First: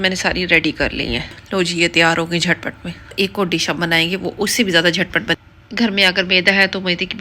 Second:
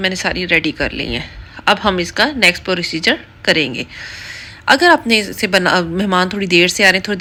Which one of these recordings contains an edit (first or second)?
first